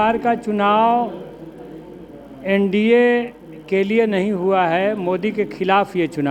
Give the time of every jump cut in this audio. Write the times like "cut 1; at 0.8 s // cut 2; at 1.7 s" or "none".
none